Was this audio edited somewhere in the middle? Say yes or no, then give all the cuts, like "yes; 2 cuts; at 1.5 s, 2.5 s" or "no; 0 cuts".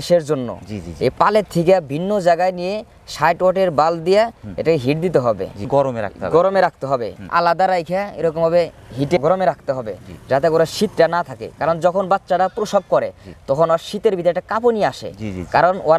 no; 0 cuts